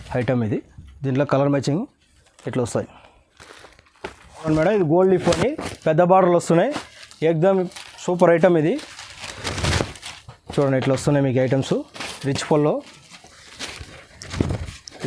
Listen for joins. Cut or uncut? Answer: cut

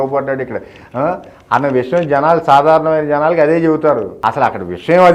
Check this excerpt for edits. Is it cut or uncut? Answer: cut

